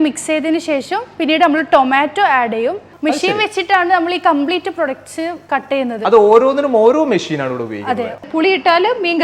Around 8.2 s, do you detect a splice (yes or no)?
yes